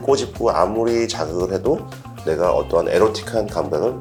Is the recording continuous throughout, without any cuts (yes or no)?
yes